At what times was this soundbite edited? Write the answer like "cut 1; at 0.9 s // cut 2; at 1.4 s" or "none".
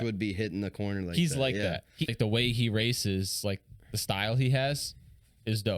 cut 1; at 2.1 s